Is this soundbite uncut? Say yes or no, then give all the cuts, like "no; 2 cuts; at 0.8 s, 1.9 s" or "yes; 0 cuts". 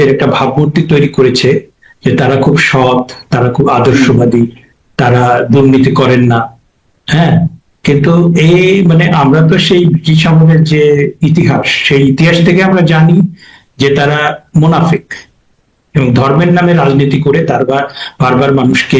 yes; 0 cuts